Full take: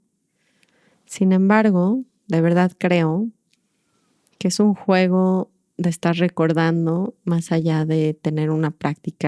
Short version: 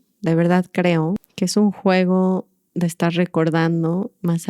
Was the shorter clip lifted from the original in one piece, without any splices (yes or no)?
no